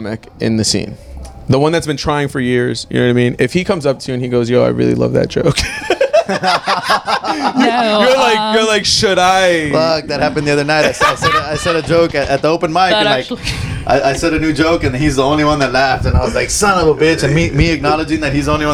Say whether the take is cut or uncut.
uncut